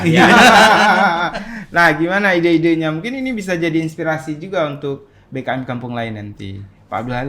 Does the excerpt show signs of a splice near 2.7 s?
no; 0 cuts

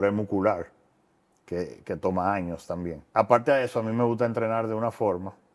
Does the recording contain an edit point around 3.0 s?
yes; 1 cut; at 3.0 s

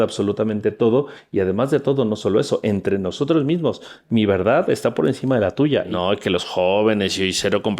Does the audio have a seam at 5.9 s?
yes; 1 cut; at 5.9 s

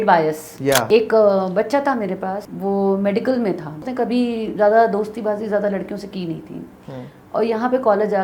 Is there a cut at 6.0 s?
no; 3 cuts; at 0.9 s, 2.5 s, 3.8 s

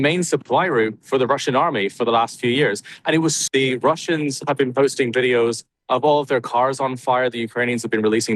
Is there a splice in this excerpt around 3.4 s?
yes; 1 cut; at 3.4 s

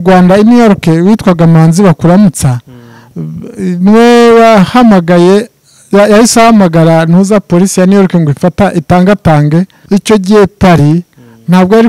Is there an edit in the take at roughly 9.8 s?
yes; 1 cut; at 9.8 s

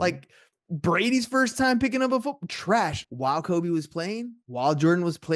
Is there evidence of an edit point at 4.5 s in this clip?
no; 1 cut; at 3.0 s

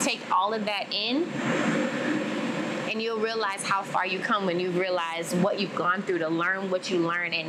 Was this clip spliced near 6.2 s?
no; 0 cuts

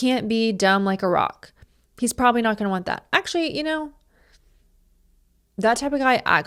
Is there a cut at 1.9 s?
no; 0 cuts

